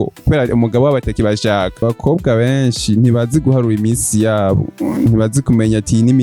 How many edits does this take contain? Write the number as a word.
one